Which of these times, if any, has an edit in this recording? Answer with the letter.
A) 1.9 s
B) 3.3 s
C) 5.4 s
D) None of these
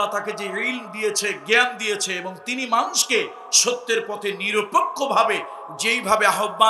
D